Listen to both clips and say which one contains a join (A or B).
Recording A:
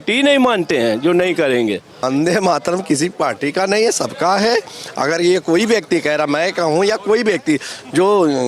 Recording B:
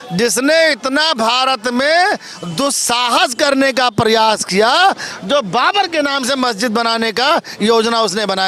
A